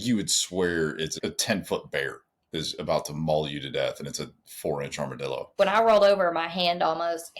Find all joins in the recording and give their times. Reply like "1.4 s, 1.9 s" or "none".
1.2 s, 5.5 s